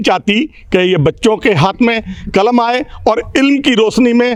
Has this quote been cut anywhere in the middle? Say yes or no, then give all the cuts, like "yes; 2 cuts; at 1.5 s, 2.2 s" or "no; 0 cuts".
no; 0 cuts